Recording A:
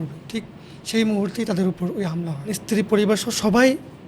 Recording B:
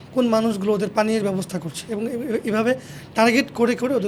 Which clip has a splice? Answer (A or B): A